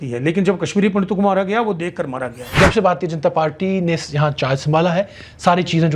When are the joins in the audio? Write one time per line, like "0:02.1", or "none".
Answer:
0:02.5